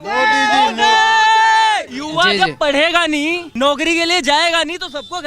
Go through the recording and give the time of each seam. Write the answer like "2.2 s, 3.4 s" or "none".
2.0 s, 3.4 s